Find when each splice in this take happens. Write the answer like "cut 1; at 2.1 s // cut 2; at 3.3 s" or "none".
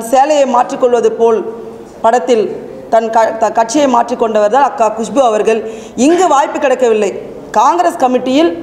none